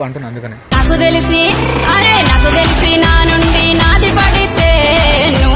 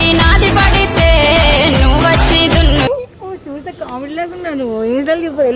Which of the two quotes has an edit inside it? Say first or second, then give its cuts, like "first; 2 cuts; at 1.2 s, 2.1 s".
second; 1 cut; at 2.9 s